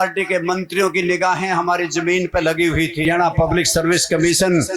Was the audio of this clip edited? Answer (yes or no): yes